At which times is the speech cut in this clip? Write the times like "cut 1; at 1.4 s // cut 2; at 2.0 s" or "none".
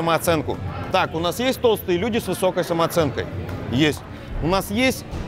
none